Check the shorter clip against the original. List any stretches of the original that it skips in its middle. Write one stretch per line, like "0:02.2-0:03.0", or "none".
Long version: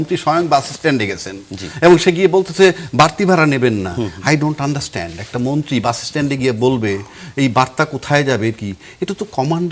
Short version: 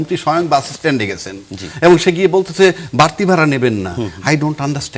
none